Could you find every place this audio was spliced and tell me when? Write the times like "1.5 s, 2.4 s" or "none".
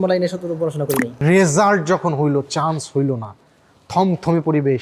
1.2 s